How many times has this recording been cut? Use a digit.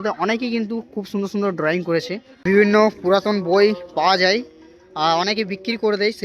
1